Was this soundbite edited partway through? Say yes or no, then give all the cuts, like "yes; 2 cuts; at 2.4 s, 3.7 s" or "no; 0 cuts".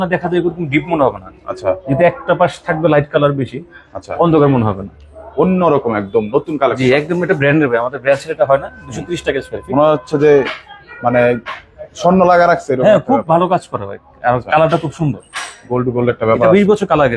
no; 0 cuts